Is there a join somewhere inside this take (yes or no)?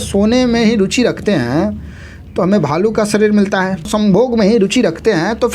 yes